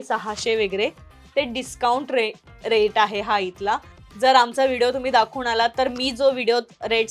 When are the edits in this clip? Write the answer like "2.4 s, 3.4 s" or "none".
none